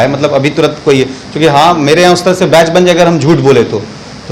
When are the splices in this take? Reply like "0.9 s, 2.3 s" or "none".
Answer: none